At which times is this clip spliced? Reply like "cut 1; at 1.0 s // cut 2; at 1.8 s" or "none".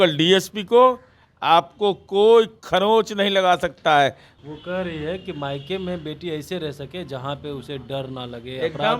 cut 1; at 4.3 s